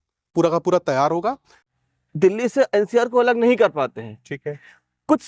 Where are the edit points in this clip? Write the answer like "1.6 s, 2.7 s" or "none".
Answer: 1.6 s